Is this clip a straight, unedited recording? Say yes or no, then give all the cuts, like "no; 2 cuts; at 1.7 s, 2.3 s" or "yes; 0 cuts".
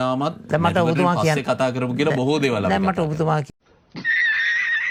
yes; 0 cuts